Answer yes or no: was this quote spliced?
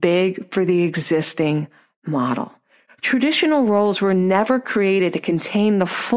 no